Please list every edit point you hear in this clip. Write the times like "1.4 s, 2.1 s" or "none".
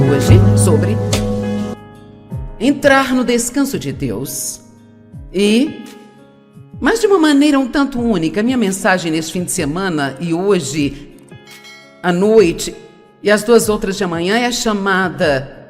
1.8 s